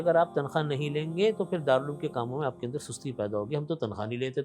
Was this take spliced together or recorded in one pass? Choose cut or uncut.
uncut